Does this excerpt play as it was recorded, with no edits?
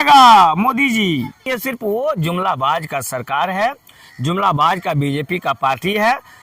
no; 1 cut; at 1.5 s

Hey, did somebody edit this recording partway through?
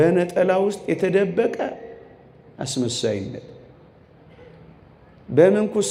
no; 0 cuts

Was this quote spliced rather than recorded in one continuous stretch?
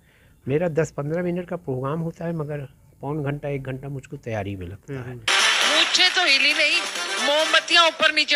yes; 1 cut; at 5.1 s

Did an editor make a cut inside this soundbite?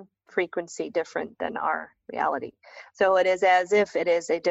no; 0 cuts

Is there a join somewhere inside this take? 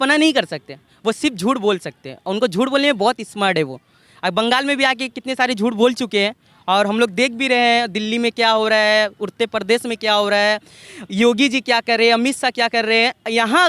no; 0 cuts

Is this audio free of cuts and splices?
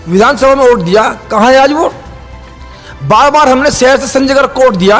yes; 0 cuts

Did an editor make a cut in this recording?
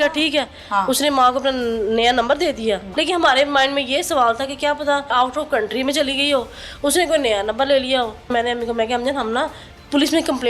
yes; 3 cuts; at 2.9 s, 5.1 s, 8.3 s

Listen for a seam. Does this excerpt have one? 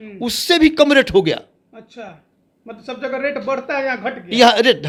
no; 0 cuts

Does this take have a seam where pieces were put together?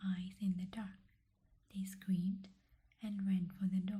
no; 0 cuts

